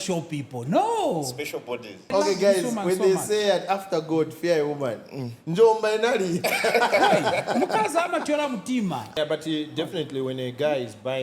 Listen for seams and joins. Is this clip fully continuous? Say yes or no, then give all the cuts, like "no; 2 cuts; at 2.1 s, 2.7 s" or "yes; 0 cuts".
no; 2 cuts; at 2.1 s, 9.2 s